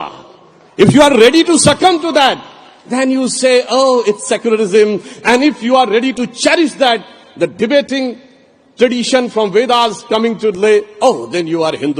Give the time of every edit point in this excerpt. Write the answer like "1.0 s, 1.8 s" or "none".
none